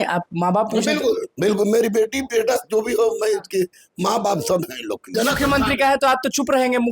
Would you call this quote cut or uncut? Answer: cut